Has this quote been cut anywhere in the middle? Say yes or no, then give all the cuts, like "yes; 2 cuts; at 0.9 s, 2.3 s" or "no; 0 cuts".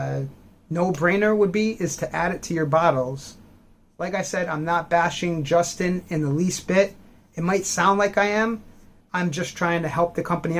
no; 0 cuts